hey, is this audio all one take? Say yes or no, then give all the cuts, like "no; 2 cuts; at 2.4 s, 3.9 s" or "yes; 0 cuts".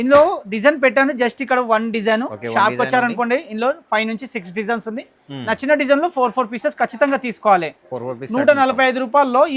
yes; 0 cuts